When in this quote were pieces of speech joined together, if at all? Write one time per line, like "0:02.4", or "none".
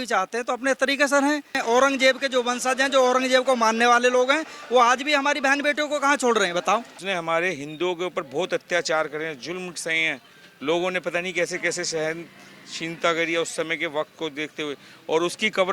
0:01.6
0:07.0